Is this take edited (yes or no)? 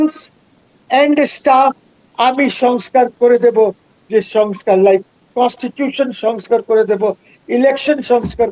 no